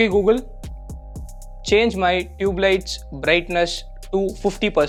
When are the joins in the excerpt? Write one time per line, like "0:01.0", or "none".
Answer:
none